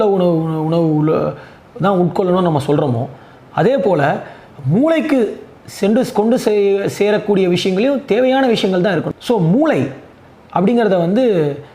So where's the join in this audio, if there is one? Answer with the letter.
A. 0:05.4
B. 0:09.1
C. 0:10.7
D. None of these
B